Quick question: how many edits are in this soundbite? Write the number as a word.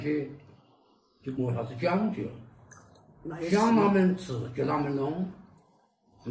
one